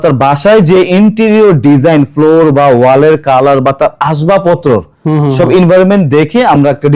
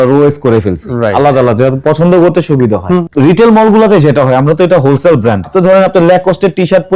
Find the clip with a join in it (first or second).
second